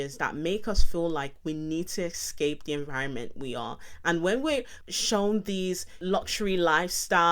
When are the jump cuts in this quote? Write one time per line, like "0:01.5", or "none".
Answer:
0:04.8
0:06.0